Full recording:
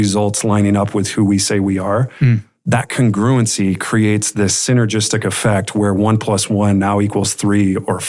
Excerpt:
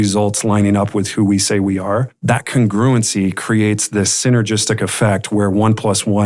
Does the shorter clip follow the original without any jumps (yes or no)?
no